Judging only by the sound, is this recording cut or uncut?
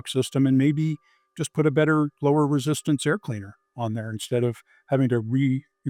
uncut